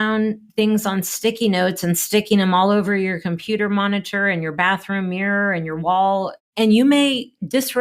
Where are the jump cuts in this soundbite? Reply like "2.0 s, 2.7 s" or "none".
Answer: 6.4 s

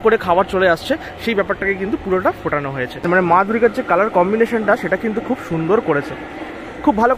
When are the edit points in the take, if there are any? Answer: 3.0 s

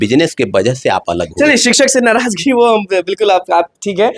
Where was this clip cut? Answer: none

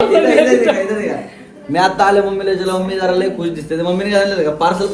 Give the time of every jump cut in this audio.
none

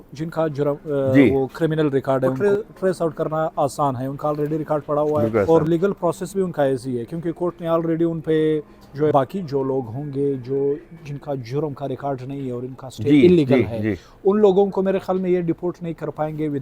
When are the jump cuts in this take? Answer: 2.3 s, 5.5 s, 9.1 s

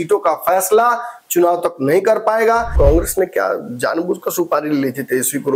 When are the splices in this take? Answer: 2.7 s

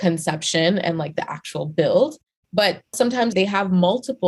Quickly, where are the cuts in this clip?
3.1 s

